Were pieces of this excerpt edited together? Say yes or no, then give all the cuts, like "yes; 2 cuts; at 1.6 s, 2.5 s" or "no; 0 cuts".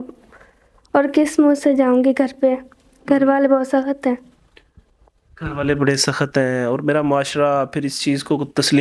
no; 0 cuts